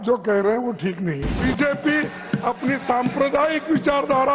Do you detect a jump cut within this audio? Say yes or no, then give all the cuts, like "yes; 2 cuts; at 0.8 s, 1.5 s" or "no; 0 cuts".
yes; 1 cut; at 1.3 s